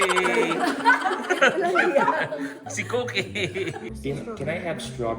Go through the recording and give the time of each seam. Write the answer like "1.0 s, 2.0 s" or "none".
3.9 s